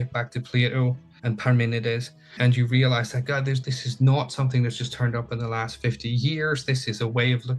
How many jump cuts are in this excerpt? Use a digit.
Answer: 3